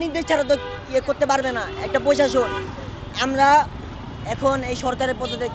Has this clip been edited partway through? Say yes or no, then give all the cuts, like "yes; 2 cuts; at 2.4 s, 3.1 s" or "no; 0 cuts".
no; 0 cuts